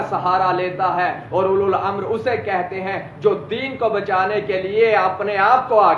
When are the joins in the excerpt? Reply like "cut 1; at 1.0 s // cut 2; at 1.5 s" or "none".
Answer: none